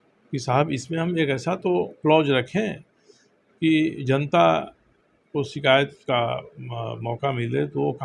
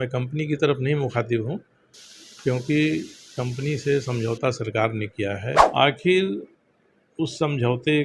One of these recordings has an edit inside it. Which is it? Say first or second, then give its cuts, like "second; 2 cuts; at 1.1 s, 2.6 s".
second; 1 cut; at 5.7 s